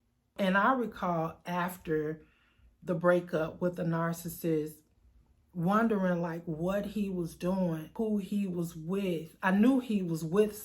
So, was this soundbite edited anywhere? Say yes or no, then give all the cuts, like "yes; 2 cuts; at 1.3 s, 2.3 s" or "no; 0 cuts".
yes; 1 cut; at 7.9 s